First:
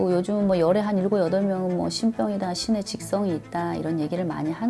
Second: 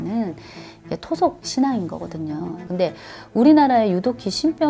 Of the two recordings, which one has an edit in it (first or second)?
second